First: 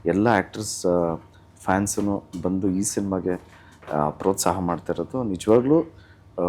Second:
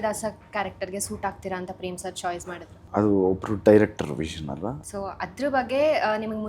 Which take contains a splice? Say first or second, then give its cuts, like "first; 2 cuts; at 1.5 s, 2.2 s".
second; 2 cuts; at 2.8 s, 4.8 s